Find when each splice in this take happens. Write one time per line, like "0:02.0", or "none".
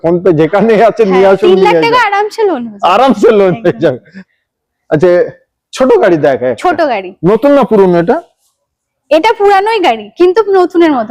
none